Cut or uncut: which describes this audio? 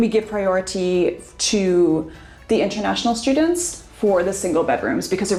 uncut